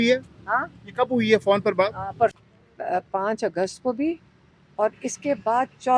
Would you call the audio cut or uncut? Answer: cut